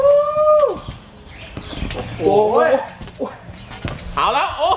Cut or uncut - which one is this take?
uncut